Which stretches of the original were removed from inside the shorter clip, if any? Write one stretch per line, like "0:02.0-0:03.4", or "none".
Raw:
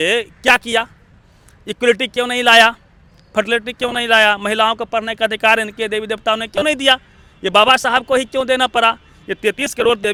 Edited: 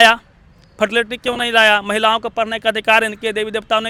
none